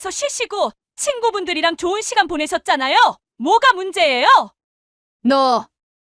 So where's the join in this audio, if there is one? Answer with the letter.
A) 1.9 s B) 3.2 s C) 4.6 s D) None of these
C